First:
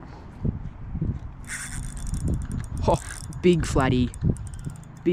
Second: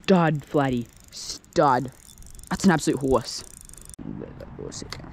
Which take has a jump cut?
second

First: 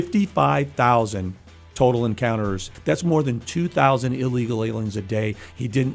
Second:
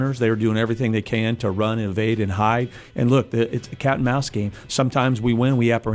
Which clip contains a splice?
first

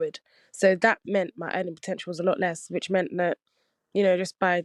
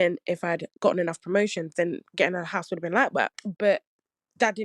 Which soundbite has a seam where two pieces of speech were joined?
second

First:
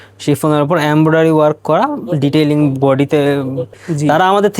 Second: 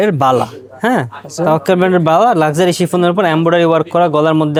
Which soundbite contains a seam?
first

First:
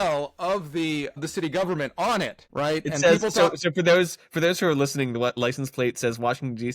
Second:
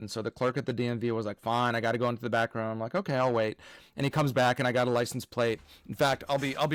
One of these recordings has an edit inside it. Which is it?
first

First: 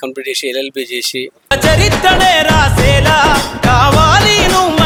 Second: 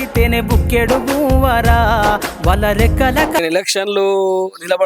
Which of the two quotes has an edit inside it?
second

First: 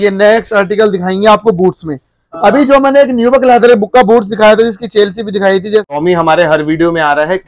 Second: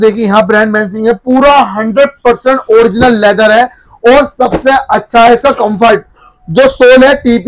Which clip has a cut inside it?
first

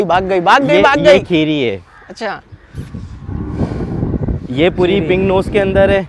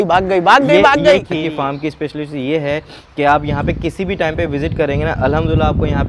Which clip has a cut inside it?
second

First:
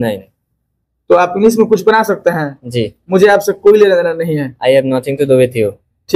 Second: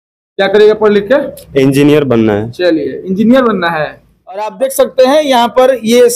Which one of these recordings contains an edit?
second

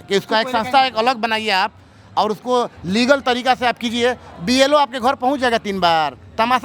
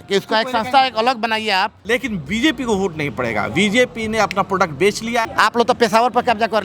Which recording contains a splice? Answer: second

